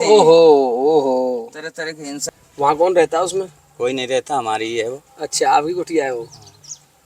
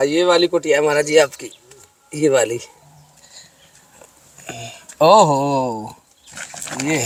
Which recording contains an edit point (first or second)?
first